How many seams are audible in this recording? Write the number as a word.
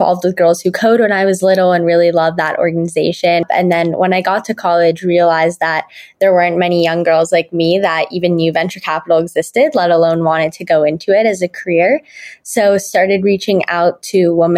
one